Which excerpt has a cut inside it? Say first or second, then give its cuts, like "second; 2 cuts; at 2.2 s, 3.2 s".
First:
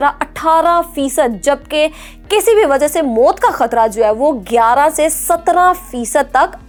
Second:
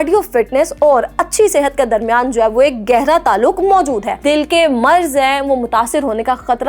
second; 1 cut; at 4.2 s